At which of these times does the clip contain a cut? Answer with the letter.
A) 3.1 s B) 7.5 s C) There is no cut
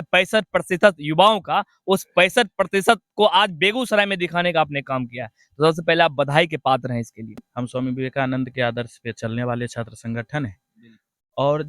B